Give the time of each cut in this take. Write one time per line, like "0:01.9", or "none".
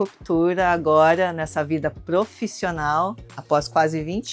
0:03.2